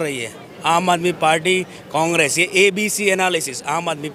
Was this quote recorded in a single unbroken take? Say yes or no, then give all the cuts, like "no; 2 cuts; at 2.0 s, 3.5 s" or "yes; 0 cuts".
yes; 0 cuts